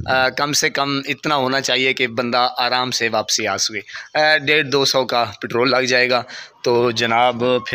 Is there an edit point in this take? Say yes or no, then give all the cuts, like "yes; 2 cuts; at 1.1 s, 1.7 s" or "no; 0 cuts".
no; 0 cuts